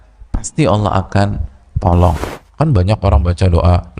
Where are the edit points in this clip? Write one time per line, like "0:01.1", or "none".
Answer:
0:02.3